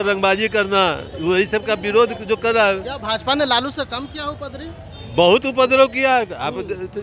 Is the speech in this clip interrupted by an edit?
no; 0 cuts

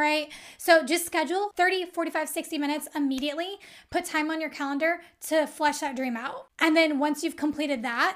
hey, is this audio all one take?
no; 2 cuts; at 1.5 s, 6.5 s

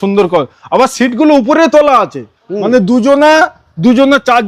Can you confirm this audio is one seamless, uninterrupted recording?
yes; 0 cuts

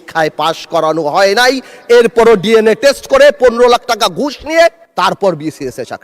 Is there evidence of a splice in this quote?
yes; 1 cut; at 4.8 s

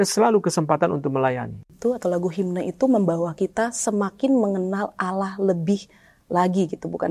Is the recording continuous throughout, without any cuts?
no; 1 cut; at 1.7 s

